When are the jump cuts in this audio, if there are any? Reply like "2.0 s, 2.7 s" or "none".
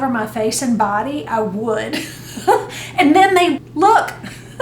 3.7 s